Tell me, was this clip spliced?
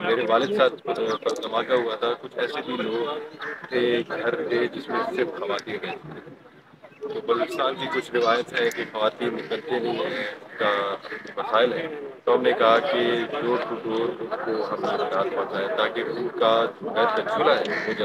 no; 0 cuts

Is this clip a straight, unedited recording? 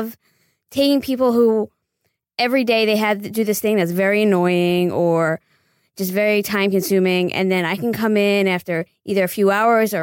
yes; 0 cuts

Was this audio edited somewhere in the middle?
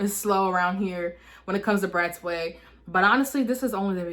no; 0 cuts

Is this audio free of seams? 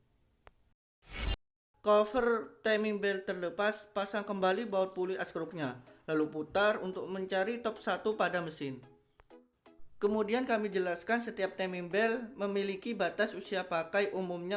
no; 1 cut; at 1.3 s

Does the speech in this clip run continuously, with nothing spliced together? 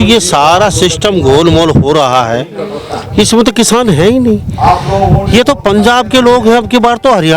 yes; 0 cuts

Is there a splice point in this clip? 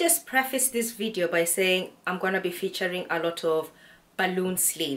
no; 0 cuts

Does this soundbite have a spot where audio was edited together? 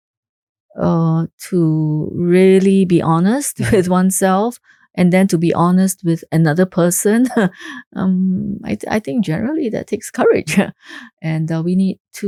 no; 0 cuts

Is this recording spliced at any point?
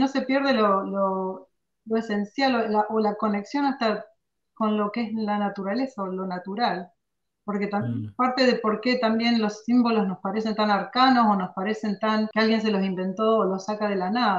yes; 1 cut; at 12.3 s

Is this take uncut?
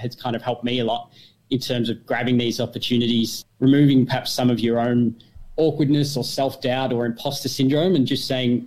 no; 1 cut; at 3.4 s

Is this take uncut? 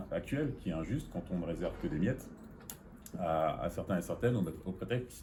yes; 0 cuts

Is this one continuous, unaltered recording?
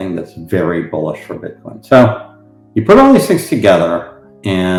yes; 0 cuts

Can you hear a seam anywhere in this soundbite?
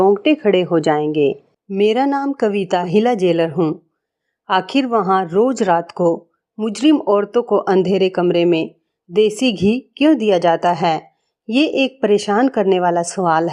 yes; 1 cut; at 2.9 s

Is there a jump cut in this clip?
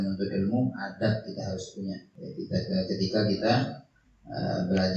yes; 1 cut; at 2.1 s

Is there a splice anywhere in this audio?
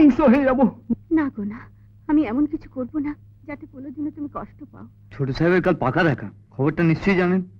yes; 1 cut; at 5.0 s

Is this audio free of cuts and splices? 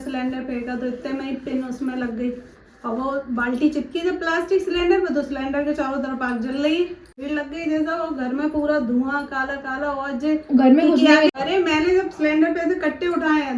no; 2 cuts; at 7.2 s, 11.3 s

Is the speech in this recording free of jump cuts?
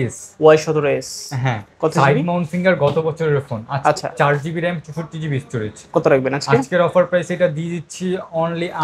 yes; 0 cuts

